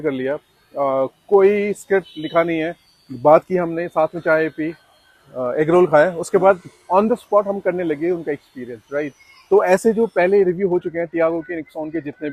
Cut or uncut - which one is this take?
uncut